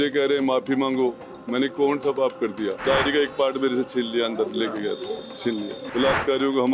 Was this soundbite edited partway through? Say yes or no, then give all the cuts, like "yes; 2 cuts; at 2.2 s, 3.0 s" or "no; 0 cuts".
yes; 2 cuts; at 2.8 s, 5.8 s